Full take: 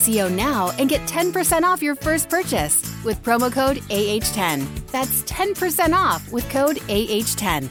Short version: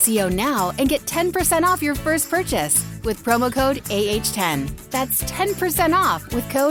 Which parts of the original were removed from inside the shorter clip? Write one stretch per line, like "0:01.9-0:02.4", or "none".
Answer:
none